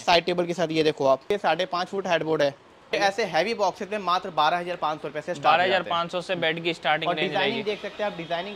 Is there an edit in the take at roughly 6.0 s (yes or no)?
no